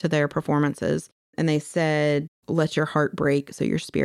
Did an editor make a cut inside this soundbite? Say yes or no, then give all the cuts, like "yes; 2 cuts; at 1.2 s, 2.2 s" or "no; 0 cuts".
yes; 2 cuts; at 1.3 s, 2.4 s